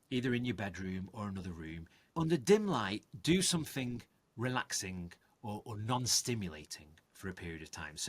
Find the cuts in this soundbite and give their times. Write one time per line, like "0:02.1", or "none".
0:01.9